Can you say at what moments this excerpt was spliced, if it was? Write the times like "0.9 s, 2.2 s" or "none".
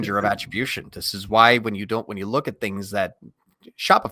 none